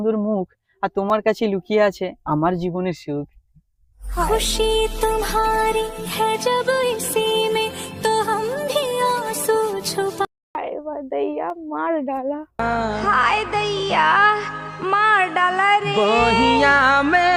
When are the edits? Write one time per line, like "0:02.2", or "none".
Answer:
none